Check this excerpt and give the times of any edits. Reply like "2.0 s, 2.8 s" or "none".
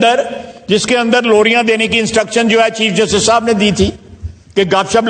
none